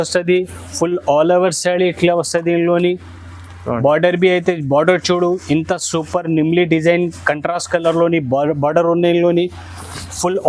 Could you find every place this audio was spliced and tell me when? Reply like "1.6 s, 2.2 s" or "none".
none